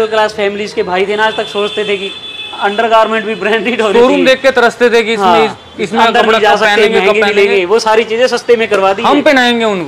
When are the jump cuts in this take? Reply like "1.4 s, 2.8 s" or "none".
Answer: none